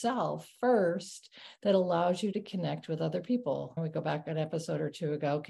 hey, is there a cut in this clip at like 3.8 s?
yes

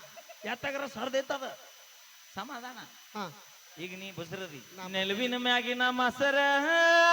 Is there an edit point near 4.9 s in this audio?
yes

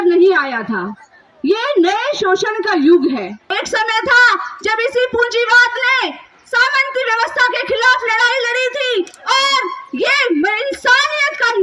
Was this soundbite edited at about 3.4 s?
yes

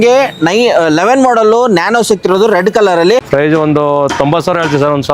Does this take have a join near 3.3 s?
yes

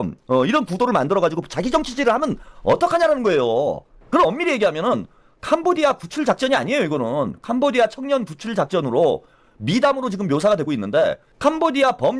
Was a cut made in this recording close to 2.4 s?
no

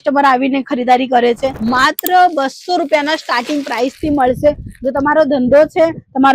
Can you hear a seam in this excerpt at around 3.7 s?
no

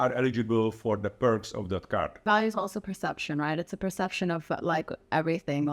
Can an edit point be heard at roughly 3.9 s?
no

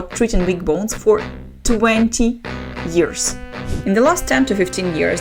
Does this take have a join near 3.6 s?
yes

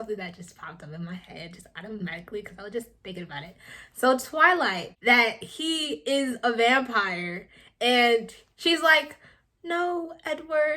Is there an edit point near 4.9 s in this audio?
yes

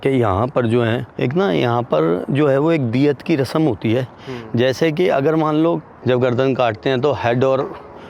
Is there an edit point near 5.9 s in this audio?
yes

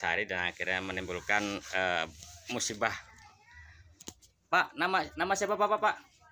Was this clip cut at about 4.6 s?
no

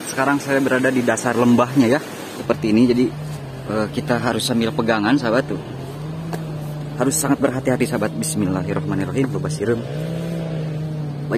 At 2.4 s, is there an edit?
yes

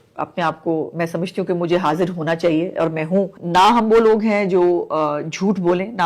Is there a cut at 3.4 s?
yes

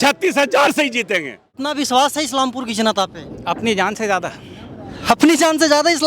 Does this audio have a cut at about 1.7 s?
yes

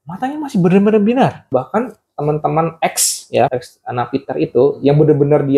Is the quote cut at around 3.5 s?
yes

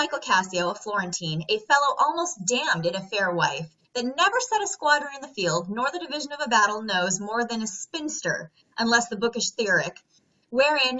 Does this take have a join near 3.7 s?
no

